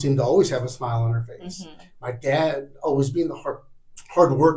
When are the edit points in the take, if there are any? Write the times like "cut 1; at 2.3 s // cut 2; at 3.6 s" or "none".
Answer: none